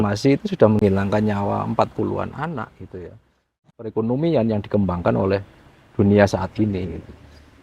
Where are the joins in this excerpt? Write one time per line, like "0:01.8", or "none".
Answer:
0:03.9